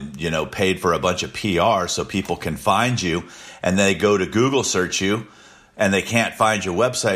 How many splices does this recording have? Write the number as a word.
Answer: zero